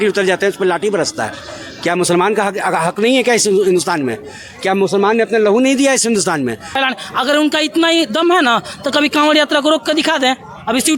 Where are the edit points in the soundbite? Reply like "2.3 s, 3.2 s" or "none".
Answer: 6.7 s